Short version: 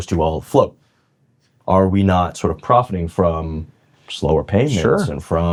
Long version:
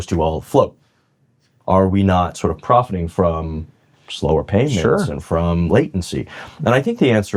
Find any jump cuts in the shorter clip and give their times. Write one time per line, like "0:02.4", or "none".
none